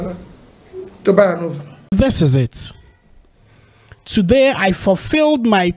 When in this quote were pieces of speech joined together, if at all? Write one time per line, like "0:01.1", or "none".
0:01.9